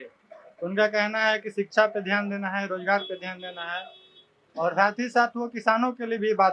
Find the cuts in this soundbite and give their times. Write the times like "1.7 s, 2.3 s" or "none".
none